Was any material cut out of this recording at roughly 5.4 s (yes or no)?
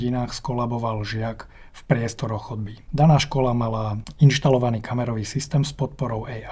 no